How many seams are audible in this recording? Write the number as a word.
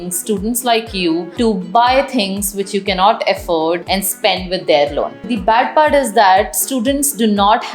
three